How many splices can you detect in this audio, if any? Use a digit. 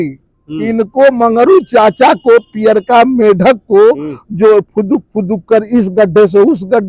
0